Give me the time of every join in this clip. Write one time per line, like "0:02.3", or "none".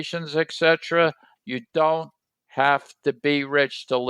0:01.3